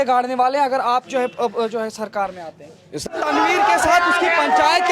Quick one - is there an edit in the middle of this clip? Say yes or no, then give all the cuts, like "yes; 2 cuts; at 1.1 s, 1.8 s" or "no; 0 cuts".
yes; 1 cut; at 3.1 s